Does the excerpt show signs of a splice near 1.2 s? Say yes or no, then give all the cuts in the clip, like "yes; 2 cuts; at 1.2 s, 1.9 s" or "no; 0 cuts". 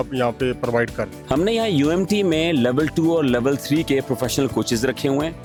no; 0 cuts